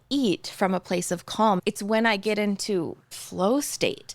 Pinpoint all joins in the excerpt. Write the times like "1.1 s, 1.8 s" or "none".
1.7 s